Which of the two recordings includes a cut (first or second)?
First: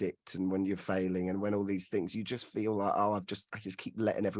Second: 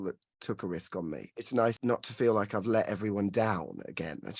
second